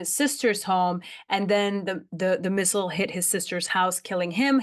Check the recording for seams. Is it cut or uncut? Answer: uncut